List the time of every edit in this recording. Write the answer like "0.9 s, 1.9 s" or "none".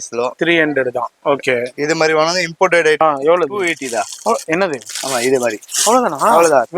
3.0 s